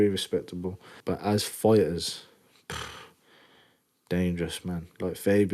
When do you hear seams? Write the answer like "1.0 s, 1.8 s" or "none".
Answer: 0.9 s

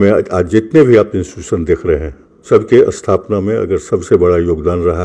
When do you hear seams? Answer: 2.4 s

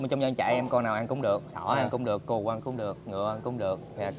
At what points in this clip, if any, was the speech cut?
none

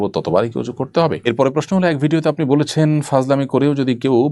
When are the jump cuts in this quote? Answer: 1.2 s

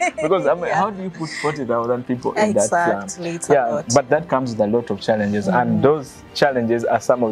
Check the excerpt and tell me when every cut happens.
none

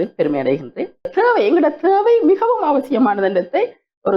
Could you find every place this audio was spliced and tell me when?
1.1 s

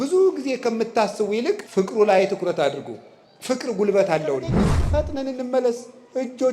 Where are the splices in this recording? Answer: 1.6 s, 4.7 s

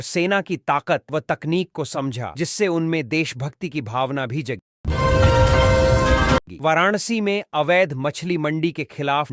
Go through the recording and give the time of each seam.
none

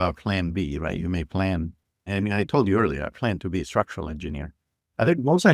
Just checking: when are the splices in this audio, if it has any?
2.1 s

